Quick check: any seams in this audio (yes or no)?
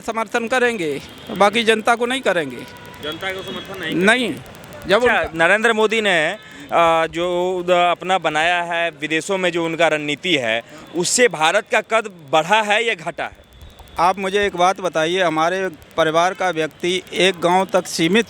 no